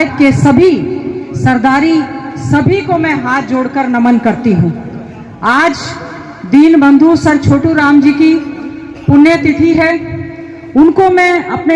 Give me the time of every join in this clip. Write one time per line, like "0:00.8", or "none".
none